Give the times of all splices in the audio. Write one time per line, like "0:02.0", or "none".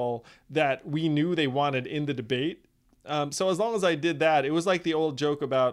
none